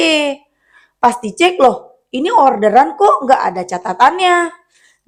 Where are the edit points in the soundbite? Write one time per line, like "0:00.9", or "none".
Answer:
none

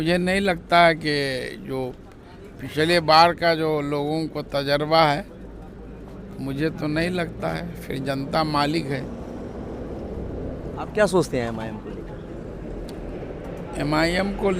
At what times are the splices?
none

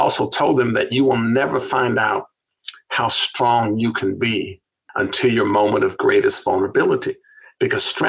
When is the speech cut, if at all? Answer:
0:04.8

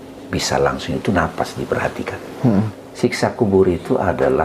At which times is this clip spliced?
0:02.8

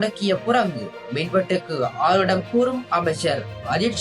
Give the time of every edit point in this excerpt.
none

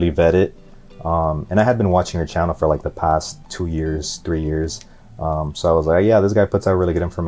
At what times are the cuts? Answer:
none

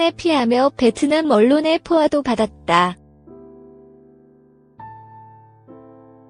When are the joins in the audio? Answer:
0:02.9

